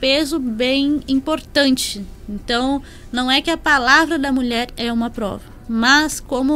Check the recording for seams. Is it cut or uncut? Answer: uncut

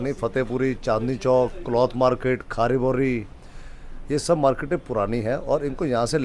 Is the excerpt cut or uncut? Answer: uncut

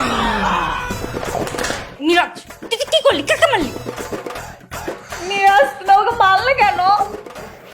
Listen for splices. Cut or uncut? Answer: cut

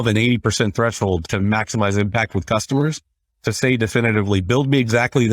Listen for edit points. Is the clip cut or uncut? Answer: cut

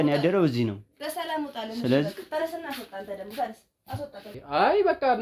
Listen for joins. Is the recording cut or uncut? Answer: cut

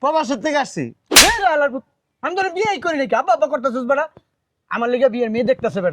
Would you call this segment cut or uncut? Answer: uncut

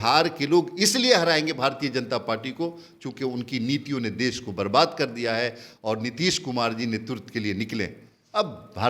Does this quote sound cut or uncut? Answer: uncut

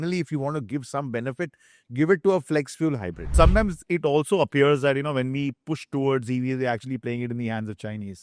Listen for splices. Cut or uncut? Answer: cut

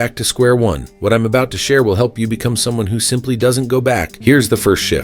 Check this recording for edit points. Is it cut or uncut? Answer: cut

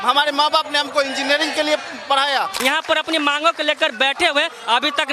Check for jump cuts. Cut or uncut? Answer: cut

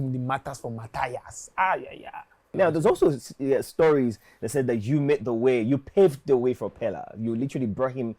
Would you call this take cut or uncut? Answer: cut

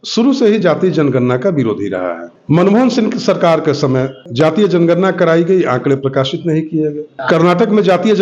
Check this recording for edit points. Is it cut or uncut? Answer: cut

